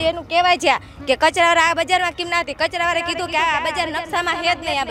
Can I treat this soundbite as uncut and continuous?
yes; 0 cuts

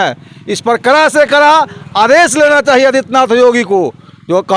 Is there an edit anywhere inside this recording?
no; 0 cuts

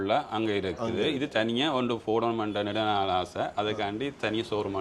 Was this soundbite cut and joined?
no; 0 cuts

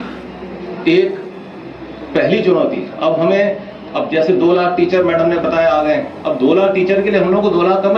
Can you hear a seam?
no; 0 cuts

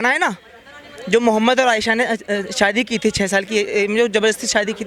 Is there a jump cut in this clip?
no; 0 cuts

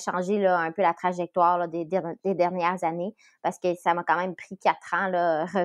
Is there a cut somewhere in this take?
no; 0 cuts

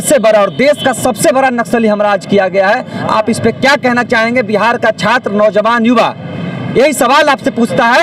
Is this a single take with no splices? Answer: yes; 0 cuts

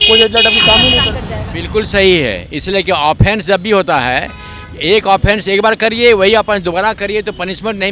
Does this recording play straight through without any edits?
no; 1 cut; at 1.1 s

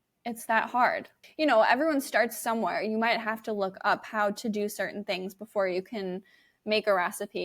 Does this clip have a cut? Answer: yes; 1 cut; at 1.1 s

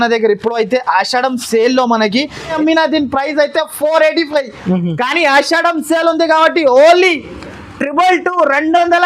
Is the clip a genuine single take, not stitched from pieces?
no; 1 cut; at 2.6 s

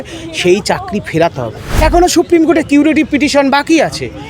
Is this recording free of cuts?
no; 1 cut; at 1.6 s

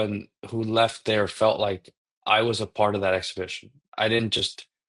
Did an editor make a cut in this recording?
no; 0 cuts

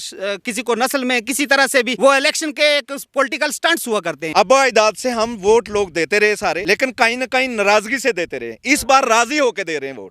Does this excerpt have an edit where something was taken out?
yes; 3 cuts; at 1.9 s, 4.2 s, 6.6 s

